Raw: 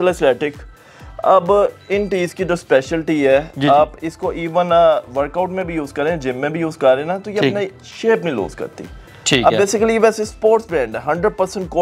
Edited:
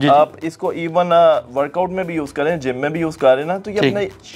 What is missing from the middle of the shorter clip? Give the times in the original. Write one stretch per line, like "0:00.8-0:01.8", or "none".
none